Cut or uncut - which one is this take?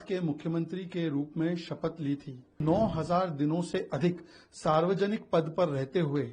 cut